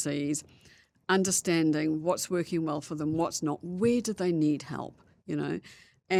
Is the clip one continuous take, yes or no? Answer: yes